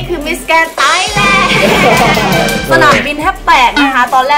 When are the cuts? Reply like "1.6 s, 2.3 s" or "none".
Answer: 2.6 s